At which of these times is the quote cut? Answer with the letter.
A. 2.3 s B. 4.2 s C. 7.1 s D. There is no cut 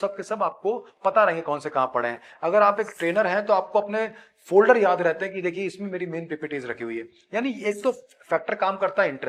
D